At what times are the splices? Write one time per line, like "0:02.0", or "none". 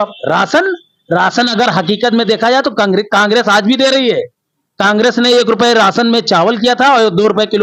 none